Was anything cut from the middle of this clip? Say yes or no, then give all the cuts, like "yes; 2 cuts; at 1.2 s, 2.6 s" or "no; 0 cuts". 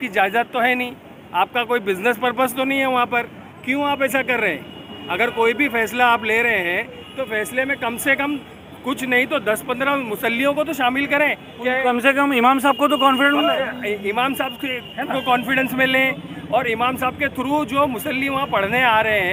no; 0 cuts